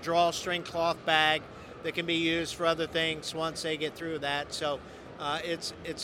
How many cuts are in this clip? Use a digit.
0